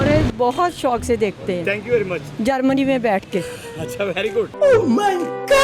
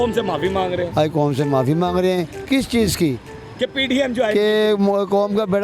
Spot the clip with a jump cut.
first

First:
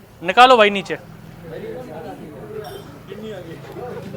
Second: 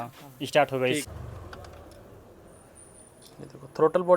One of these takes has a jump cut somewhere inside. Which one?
second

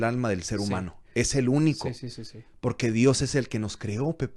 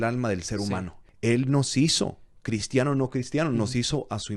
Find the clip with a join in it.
second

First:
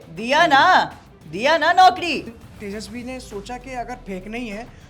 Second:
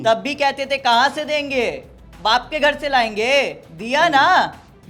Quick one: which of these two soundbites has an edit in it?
first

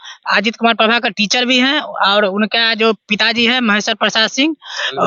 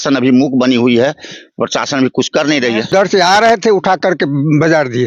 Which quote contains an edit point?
second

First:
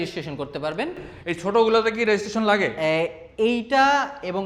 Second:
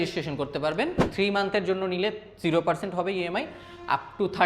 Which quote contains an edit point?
second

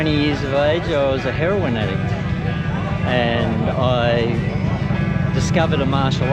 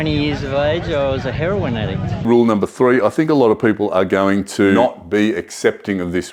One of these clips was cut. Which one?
second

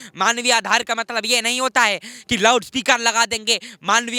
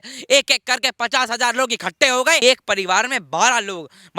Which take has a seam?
second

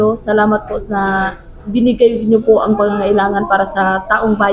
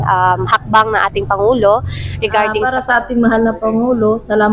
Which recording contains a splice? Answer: second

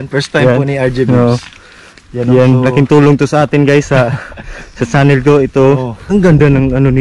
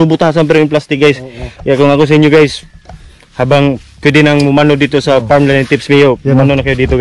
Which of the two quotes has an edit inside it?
first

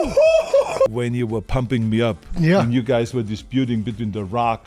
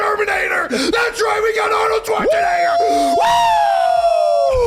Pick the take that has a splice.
first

